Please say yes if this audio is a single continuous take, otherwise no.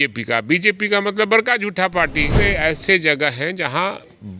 no